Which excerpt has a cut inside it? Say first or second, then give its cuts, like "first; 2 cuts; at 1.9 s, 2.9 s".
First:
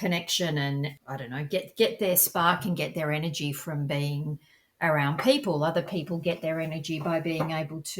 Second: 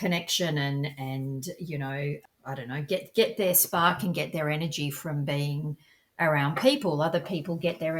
first; 1 cut; at 1.0 s